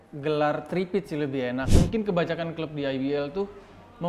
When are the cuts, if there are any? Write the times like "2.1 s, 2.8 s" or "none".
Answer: 1.7 s